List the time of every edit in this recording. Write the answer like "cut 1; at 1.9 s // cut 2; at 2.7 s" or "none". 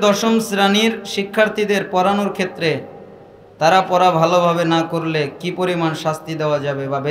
none